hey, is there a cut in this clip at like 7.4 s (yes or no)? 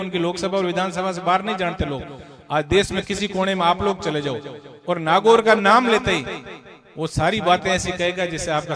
no